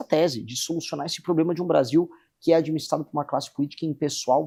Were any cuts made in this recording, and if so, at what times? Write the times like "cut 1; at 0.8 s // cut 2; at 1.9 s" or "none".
none